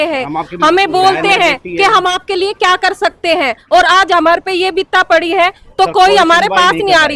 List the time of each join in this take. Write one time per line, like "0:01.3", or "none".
none